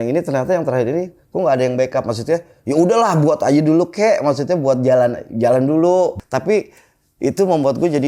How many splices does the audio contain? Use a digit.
1